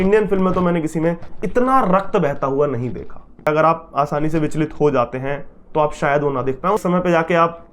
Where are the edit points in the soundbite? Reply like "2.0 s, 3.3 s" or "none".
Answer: 3.5 s, 6.8 s

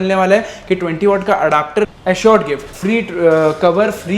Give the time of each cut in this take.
2.0 s, 2.7 s

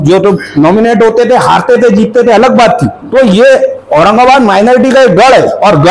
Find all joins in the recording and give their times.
3.0 s

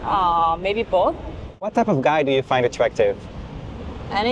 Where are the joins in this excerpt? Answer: 1.7 s

